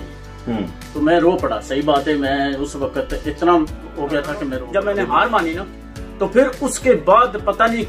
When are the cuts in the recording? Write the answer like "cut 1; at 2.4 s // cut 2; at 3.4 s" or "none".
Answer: cut 1; at 4.5 s